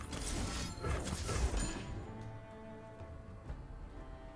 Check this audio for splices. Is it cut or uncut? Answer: uncut